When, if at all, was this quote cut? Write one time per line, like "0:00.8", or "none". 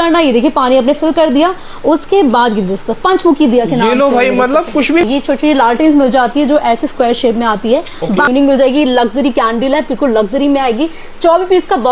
0:05.0
0:08.3